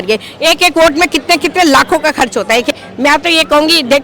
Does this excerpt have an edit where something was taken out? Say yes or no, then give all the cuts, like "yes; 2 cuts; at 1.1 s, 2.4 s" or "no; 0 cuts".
yes; 1 cut; at 2.7 s